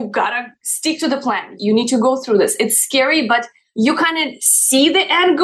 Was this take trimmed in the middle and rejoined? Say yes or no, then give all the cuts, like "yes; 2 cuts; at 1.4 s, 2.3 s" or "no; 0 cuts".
yes; 1 cut; at 1.5 s